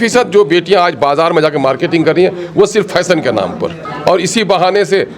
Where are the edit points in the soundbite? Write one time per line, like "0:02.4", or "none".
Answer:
0:03.8